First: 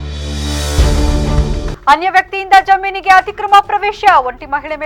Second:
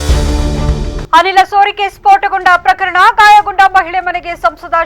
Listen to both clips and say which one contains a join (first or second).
second